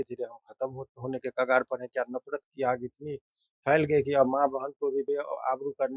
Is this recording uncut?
yes; 0 cuts

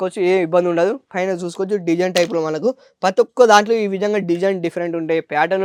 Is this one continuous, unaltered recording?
yes; 0 cuts

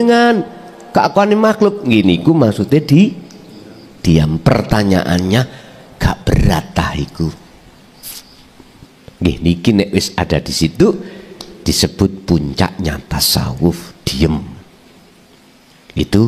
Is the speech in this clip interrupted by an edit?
yes; 1 cut; at 8.9 s

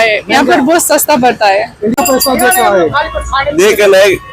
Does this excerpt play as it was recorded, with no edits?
no; 1 cut; at 2.0 s

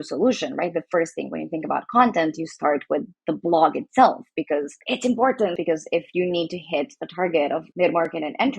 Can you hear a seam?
yes; 2 cuts; at 5.5 s, 7.7 s

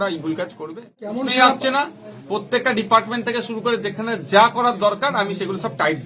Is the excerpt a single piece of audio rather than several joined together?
no; 1 cut; at 1.1 s

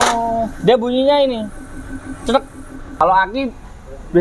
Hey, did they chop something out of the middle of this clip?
yes; 1 cut; at 3.0 s

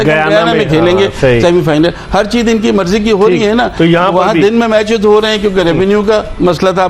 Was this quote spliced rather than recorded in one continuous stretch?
no; 0 cuts

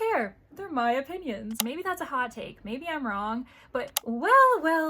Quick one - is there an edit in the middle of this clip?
yes; 2 cuts; at 1.6 s, 3.5 s

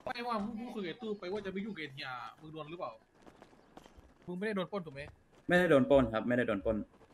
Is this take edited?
yes; 1 cut; at 4.3 s

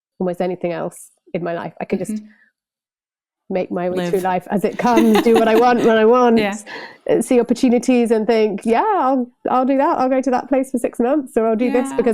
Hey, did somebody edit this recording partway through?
no; 0 cuts

